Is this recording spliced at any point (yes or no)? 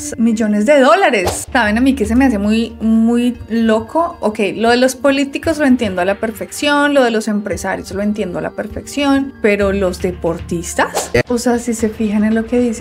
yes